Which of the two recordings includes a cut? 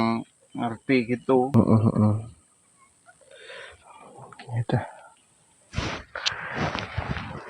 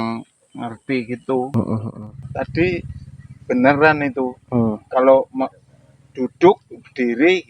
second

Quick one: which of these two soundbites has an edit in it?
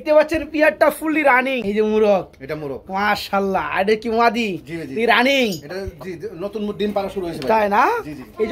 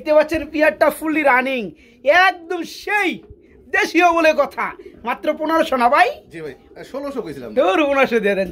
first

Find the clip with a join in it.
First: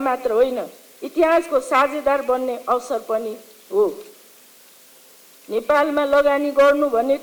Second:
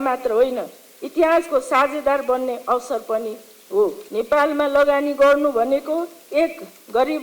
second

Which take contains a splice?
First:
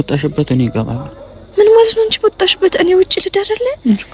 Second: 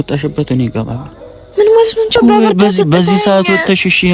second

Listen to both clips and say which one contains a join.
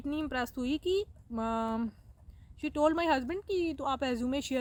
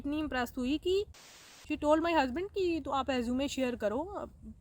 second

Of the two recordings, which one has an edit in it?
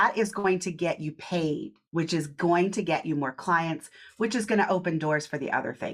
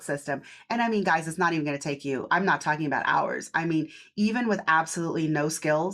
first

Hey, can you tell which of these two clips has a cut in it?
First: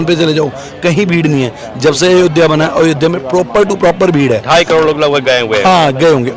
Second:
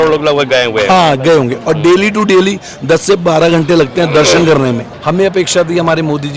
second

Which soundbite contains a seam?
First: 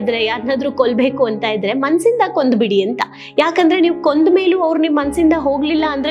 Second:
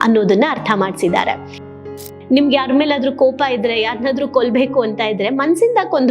second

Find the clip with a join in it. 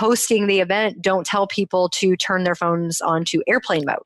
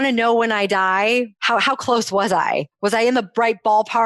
second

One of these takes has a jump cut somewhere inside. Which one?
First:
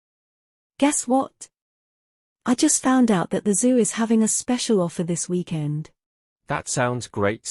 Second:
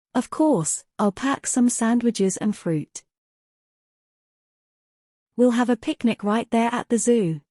first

